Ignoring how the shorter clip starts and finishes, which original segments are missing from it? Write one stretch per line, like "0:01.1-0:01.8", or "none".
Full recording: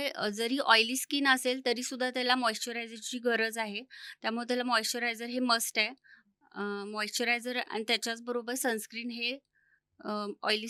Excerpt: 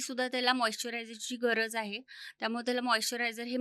none